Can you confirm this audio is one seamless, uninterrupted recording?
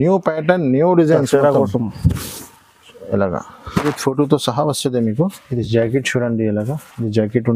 no; 1 cut; at 3.8 s

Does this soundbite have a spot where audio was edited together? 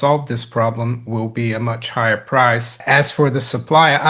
yes; 1 cut; at 2.8 s

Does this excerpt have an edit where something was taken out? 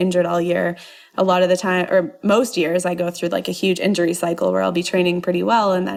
no; 0 cuts

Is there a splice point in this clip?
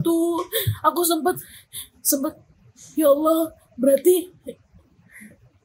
no; 0 cuts

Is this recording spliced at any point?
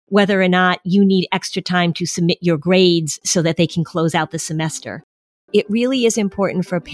no; 0 cuts

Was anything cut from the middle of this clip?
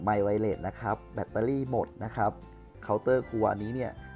yes; 1 cut; at 2.7 s

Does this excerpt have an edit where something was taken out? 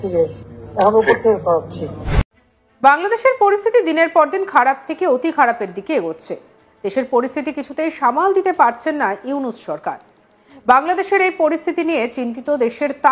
yes; 1 cut; at 2.1 s

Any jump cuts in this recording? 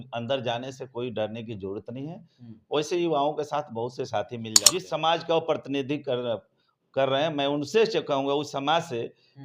yes; 1 cut; at 4.5 s

